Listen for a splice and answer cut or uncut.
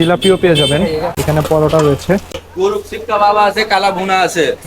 cut